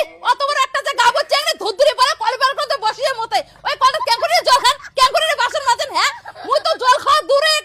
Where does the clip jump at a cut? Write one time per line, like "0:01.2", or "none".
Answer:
none